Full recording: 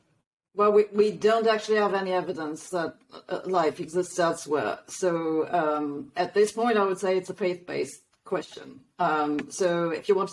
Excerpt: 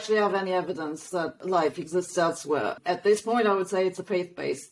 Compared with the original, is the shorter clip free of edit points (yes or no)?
no